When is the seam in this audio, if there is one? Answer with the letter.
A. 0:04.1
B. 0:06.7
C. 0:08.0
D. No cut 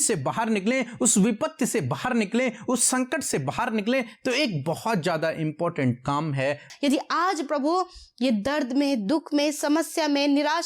B